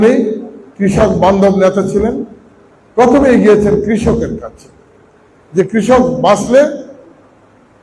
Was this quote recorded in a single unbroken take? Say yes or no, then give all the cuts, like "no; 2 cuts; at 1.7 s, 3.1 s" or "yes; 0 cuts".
yes; 0 cuts